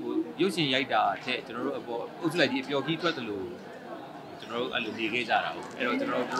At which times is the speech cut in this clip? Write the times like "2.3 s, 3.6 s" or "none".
none